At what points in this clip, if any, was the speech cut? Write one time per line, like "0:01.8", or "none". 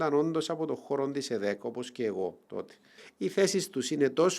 0:03.0